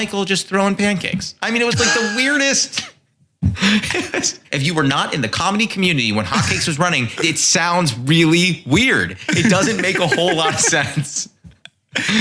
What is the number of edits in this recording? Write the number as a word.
two